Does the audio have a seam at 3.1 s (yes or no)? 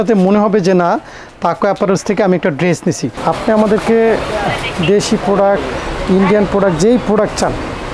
yes